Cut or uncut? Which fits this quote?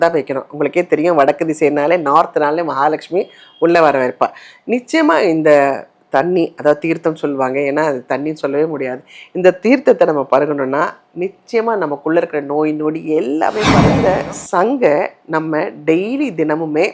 cut